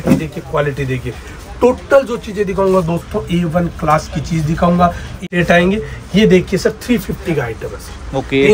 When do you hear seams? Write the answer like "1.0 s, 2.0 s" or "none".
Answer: 5.2 s